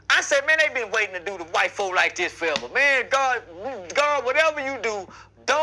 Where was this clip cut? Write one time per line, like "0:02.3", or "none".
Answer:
none

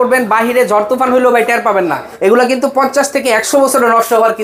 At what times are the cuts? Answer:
0:02.2

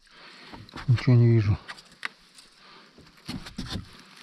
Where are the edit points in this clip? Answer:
none

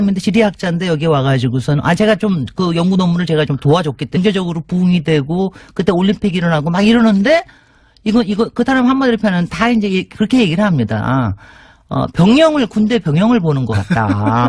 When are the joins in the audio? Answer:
none

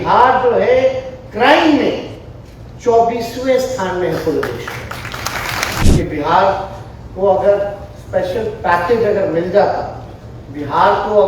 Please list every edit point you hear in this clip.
0:05.8

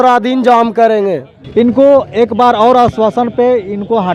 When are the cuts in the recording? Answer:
none

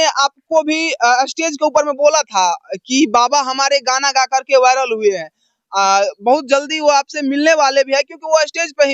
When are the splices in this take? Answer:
none

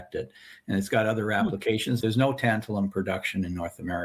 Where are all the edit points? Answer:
0:02.0

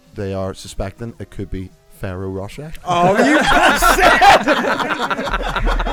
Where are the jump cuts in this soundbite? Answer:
none

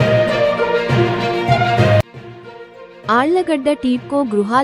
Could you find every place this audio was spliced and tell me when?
0:02.1

